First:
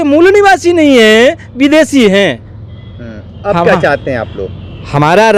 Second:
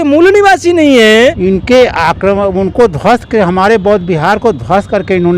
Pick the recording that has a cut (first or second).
second